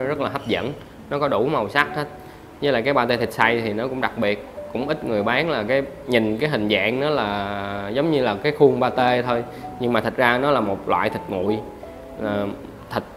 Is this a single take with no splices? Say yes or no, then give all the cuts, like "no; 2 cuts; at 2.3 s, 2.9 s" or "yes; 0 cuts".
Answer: yes; 0 cuts